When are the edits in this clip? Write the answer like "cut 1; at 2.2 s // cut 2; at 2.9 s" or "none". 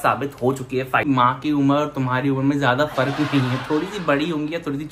cut 1; at 1.0 s